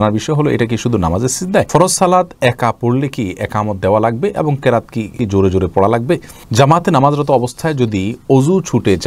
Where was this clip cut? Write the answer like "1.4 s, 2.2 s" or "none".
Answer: 1.7 s, 5.1 s, 6.4 s